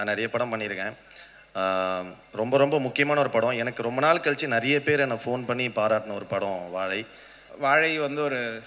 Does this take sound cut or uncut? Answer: cut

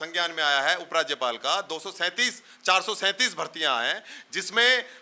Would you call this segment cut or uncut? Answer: uncut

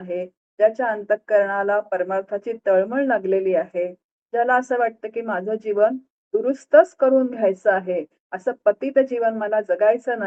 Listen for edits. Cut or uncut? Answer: uncut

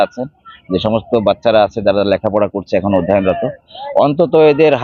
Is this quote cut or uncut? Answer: uncut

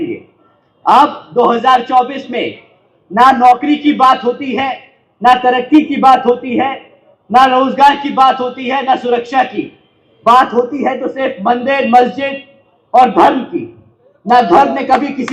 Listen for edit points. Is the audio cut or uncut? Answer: uncut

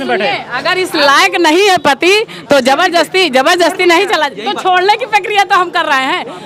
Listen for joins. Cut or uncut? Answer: uncut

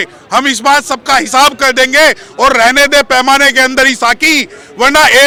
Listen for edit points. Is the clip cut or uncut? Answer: uncut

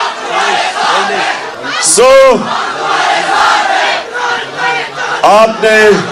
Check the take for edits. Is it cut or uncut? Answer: cut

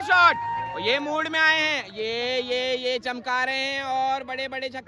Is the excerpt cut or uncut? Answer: uncut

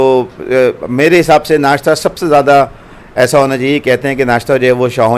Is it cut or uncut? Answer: uncut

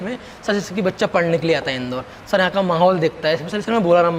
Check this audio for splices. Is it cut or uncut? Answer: uncut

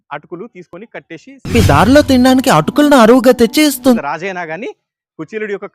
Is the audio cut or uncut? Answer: cut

